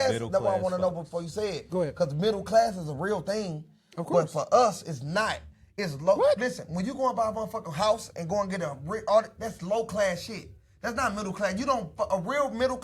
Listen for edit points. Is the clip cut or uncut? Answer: uncut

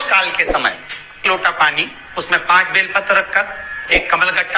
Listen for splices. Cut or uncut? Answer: cut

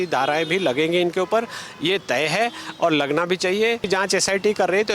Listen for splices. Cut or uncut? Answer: cut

